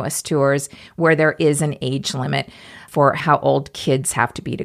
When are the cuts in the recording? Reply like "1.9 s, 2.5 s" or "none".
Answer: 3.2 s